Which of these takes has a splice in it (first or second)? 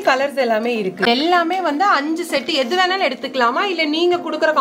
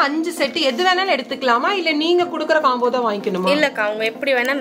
first